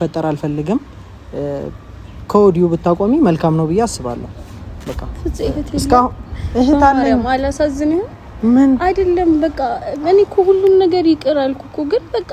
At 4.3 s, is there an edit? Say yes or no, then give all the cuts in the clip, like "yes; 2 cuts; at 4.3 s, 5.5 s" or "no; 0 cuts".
no; 0 cuts